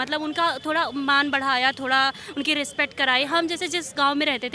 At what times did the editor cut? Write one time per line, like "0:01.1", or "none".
none